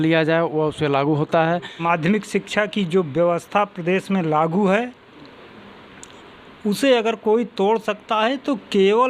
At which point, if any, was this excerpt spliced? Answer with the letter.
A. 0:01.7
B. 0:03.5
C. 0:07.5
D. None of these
A